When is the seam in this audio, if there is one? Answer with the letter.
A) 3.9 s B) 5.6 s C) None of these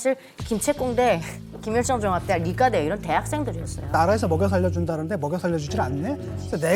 A